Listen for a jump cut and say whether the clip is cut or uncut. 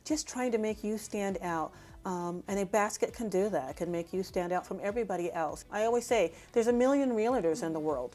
cut